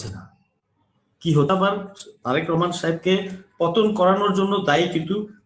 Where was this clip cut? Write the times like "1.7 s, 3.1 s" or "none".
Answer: 1.5 s